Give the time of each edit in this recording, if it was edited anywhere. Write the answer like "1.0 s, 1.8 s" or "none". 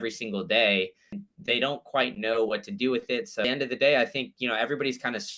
1.2 s, 3.4 s